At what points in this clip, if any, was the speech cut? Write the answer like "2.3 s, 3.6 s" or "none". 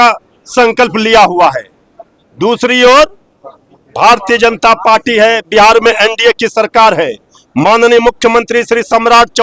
none